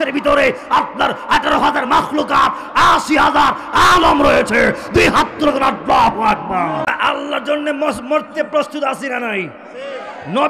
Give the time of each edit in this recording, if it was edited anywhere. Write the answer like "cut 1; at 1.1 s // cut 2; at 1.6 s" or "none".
cut 1; at 6.9 s